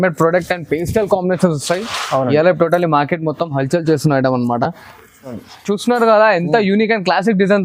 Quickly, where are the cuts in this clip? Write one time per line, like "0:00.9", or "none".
0:05.3